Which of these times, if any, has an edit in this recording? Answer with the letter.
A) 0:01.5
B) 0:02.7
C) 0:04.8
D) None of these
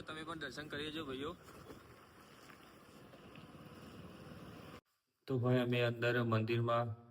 C